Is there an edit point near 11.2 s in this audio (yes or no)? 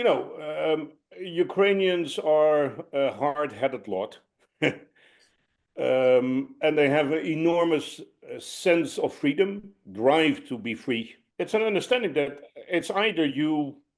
yes